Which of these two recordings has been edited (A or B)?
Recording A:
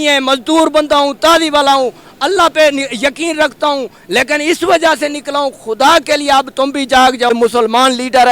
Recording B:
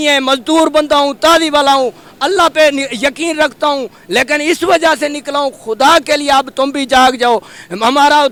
A